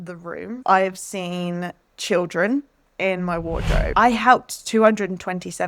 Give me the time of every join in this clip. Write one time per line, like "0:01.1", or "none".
0:03.9